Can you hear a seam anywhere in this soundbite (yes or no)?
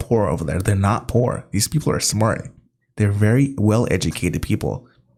no